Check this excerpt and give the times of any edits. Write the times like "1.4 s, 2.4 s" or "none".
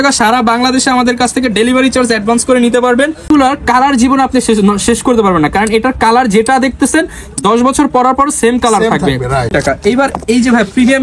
3.3 s, 9.6 s